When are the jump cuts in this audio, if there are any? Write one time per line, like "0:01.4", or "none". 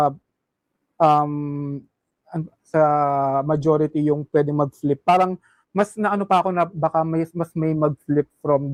none